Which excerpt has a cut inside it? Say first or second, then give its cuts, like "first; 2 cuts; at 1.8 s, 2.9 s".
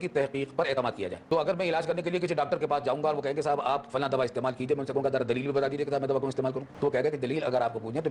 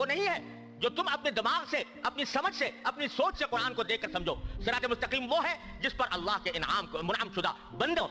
first; 2 cuts; at 1.2 s, 6.7 s